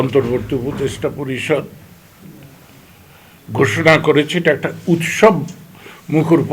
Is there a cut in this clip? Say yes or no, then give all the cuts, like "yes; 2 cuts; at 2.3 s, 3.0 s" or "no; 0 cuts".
no; 0 cuts